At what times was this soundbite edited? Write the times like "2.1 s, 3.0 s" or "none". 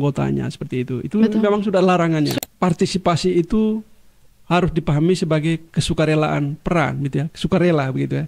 2.4 s